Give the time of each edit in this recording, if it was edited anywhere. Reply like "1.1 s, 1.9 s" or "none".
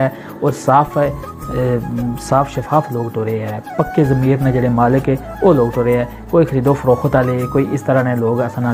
none

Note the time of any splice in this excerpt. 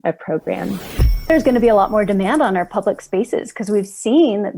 1.3 s

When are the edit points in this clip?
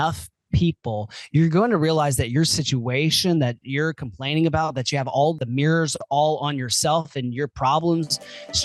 5.4 s

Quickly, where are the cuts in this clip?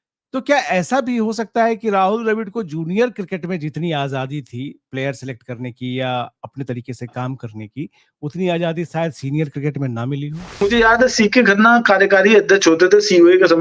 10.6 s

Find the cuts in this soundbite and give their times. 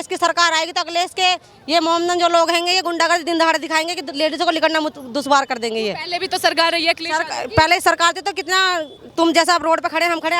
none

